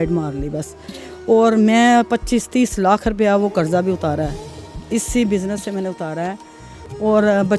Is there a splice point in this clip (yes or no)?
no